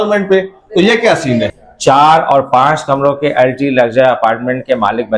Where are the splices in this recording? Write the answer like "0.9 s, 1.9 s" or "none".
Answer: 1.6 s